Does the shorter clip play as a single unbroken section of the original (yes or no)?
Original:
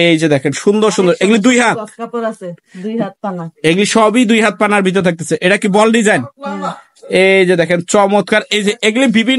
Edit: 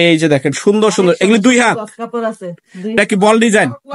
no